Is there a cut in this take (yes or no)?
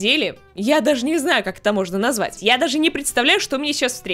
yes